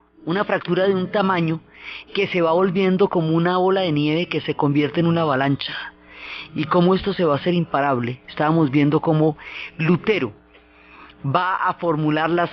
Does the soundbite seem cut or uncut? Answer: cut